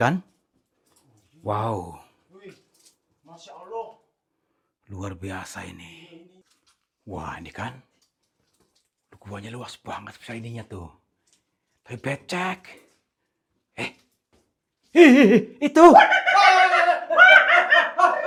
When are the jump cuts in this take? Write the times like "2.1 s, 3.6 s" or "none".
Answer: none